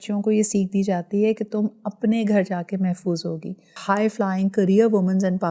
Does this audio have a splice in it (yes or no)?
yes